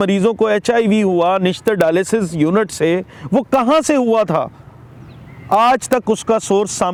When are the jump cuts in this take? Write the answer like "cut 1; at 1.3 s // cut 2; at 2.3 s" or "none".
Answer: none